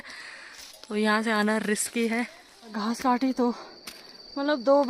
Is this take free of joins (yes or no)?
no